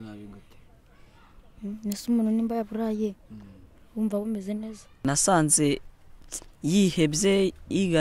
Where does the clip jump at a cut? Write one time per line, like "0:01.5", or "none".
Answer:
0:05.1